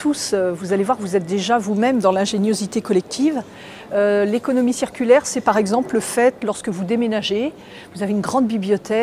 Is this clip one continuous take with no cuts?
yes; 0 cuts

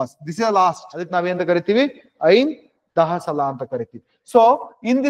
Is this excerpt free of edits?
no; 1 cut; at 1.1 s

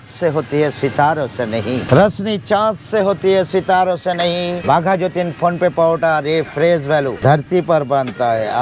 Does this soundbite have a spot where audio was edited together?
yes; 3 cuts; at 1.8 s, 4.6 s, 7.2 s

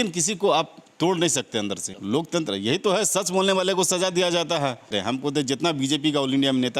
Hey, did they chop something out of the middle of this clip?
yes; 2 cuts; at 1.9 s, 4.9 s

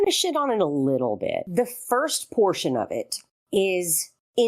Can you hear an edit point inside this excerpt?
yes; 1 cut; at 1.4 s

